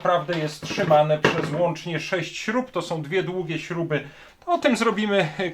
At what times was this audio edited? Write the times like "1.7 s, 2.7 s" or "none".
4.3 s